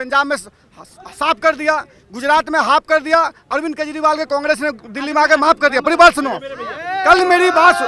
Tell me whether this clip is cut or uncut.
uncut